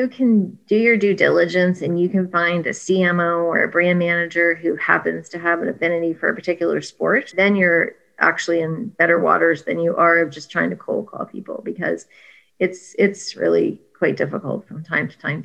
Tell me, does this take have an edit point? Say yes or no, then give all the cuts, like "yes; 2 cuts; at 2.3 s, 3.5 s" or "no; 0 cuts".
yes; 2 cuts; at 7.3 s, 8.1 s